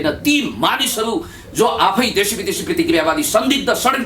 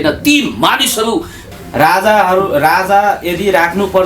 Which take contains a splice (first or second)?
second